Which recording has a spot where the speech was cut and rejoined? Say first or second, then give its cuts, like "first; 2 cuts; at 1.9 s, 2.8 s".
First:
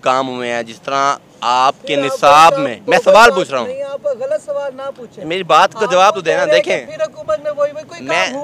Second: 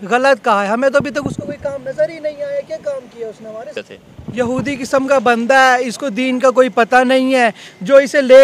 second; 1 cut; at 3.7 s